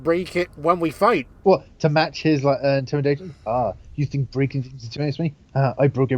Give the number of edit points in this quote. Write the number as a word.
one